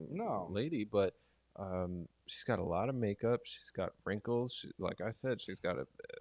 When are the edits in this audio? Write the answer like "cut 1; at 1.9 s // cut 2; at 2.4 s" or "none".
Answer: none

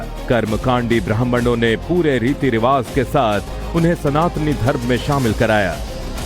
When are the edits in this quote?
cut 1; at 1.8 s

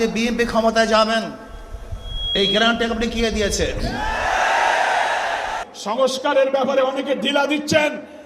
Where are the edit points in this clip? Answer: cut 1; at 5.5 s

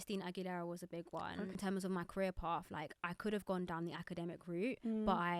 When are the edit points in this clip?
cut 1; at 1.6 s

